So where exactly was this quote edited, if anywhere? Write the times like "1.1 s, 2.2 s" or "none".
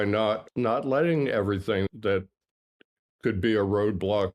1.9 s

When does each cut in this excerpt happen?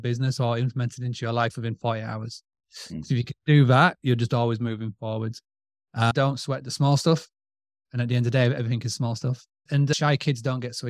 6.1 s, 9.8 s

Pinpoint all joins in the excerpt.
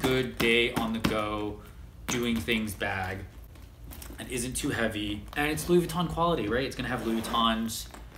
none

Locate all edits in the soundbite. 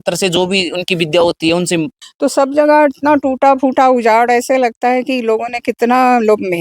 2.0 s

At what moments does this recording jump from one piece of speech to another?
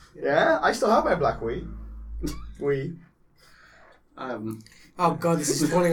none

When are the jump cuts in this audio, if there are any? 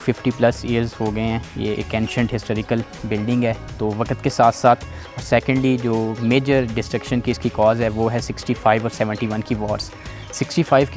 none

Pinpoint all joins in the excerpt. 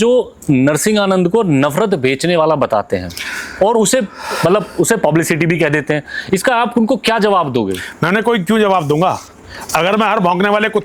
none

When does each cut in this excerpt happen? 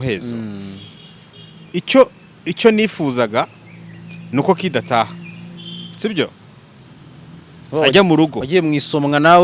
none

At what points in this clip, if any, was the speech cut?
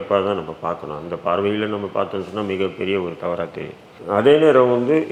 none

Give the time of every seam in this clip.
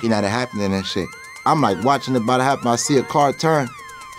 1.3 s

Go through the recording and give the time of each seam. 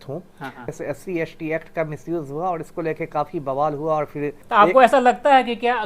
0.7 s, 4.4 s

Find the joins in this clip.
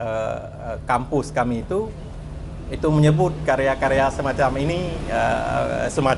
none

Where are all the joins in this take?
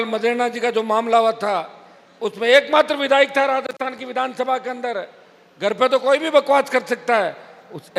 none

